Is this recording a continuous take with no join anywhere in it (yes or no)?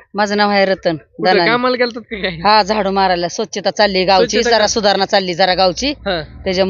yes